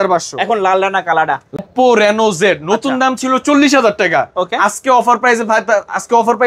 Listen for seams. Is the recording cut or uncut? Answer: cut